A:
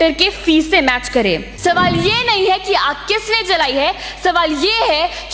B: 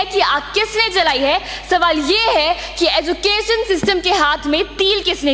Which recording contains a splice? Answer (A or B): A